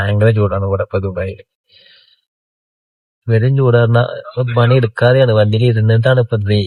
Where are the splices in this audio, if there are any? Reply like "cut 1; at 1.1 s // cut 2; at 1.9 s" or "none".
none